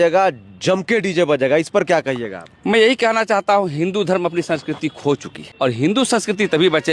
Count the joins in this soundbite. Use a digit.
1